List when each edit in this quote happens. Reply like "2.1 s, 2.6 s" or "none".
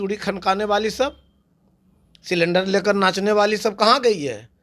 none